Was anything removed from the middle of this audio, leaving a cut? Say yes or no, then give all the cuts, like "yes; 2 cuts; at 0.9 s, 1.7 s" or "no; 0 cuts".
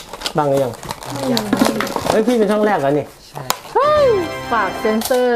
yes; 1 cut; at 4.4 s